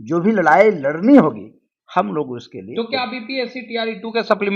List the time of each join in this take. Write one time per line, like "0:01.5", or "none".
none